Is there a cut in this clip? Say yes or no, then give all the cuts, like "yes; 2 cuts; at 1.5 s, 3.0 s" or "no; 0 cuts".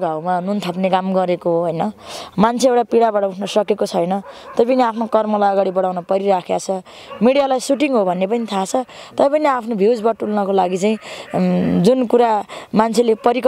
no; 0 cuts